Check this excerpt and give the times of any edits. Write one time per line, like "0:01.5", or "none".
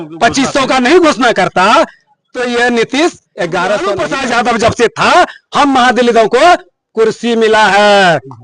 0:04.1